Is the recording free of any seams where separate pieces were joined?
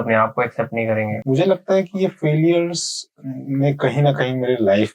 no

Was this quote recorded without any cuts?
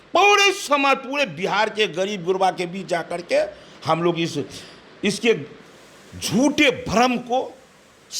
yes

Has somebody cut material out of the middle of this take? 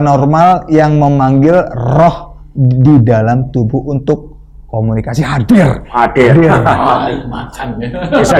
no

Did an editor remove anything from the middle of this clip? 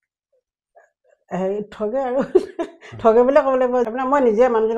yes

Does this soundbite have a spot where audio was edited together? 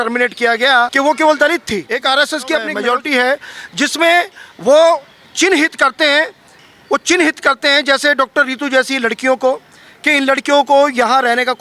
yes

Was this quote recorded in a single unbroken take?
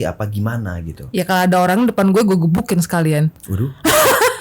yes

